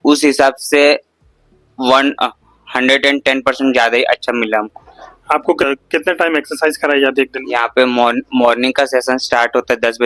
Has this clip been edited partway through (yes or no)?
yes